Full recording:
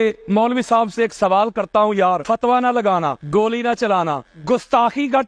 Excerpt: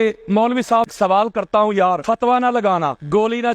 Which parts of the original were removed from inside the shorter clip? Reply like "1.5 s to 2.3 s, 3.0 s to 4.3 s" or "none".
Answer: 0.9 s to 1.1 s

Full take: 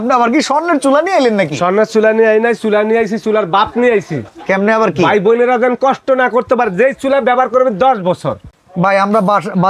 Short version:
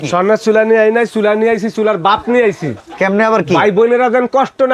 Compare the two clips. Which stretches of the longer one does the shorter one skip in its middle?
none

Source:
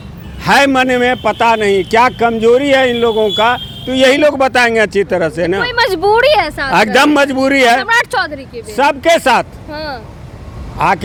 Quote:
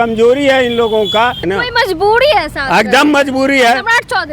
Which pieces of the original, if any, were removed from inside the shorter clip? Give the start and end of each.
3.7 s to 5.4 s

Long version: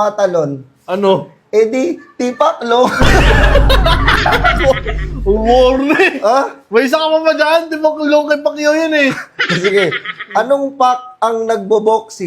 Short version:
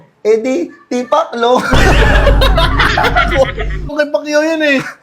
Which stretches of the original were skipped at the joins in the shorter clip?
5.2 s to 8.2 s

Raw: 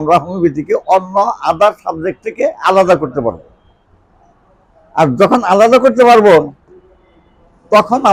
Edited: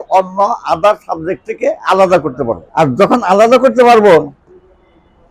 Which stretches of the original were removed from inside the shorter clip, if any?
3.4 s to 4.9 s

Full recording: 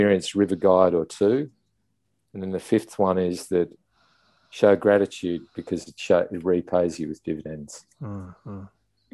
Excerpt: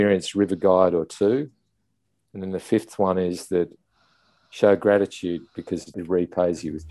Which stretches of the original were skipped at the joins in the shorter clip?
6.0 s to 6.3 s

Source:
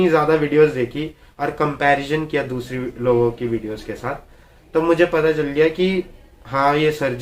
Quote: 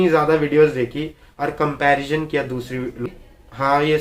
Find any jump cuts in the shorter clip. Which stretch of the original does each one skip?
3.1 s to 6.0 s

